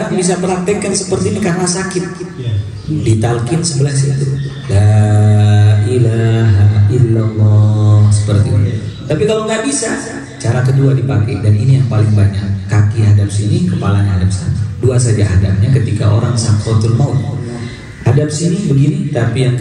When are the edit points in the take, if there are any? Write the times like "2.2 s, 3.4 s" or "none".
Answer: none